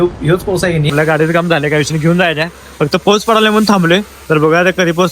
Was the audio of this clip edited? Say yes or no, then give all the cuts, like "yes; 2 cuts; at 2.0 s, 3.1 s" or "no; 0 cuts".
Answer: yes; 1 cut; at 0.9 s